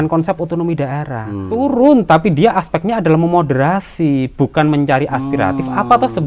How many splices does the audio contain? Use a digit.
1